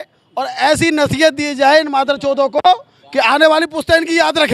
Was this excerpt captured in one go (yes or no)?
yes